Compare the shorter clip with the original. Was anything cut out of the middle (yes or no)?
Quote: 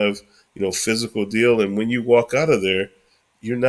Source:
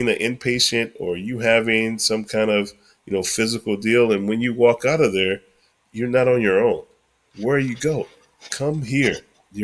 no